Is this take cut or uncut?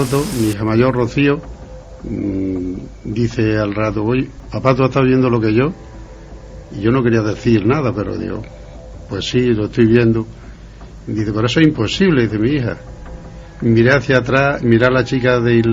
cut